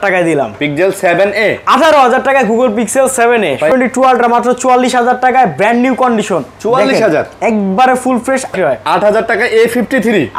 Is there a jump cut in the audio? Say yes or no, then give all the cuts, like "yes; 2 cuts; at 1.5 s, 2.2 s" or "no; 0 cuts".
yes; 2 cuts; at 3.7 s, 8.5 s